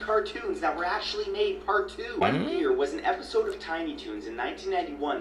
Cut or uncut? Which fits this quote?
cut